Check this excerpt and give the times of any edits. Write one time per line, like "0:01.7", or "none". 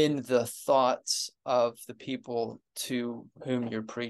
0:02.7